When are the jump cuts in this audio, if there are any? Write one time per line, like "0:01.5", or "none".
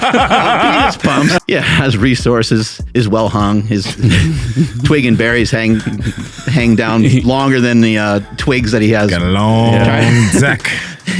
0:01.4